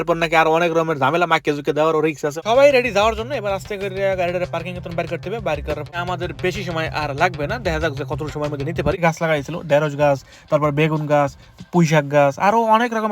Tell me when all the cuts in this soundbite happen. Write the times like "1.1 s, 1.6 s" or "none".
2.4 s, 5.9 s, 9.0 s